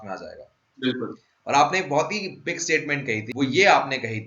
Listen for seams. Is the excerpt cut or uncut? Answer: cut